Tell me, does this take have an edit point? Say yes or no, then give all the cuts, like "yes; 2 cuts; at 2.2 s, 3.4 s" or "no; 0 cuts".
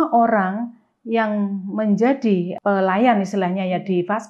yes; 1 cut; at 2.5 s